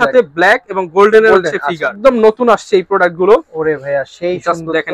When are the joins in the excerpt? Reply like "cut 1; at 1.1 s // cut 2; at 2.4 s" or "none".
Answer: cut 1; at 1.9 s